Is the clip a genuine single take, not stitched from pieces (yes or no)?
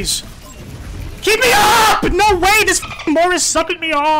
no